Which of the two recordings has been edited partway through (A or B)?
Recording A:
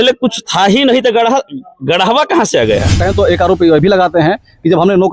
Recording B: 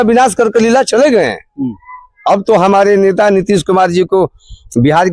A